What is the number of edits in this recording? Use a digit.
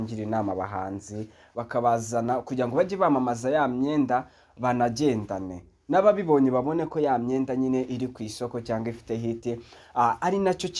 1